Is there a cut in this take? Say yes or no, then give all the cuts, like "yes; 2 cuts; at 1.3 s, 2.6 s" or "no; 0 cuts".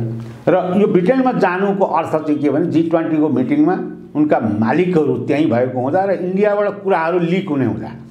no; 0 cuts